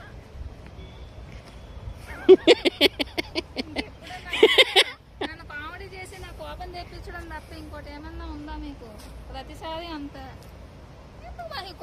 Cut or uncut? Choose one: uncut